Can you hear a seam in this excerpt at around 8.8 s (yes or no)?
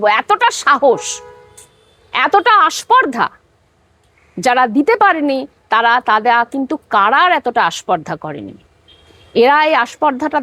no